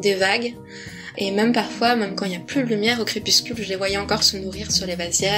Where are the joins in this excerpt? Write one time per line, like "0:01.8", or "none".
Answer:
none